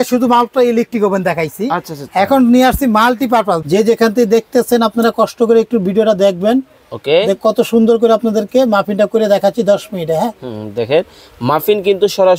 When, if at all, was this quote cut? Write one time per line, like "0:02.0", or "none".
0:03.6